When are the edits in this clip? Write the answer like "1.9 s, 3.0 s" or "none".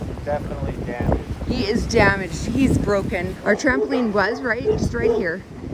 3.3 s